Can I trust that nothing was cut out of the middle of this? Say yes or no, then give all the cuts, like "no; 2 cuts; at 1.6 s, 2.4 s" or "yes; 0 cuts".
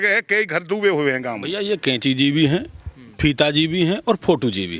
no; 1 cut; at 1.5 s